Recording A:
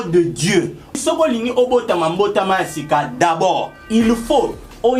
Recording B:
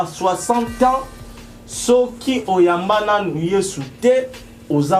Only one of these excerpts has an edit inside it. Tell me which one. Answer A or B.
A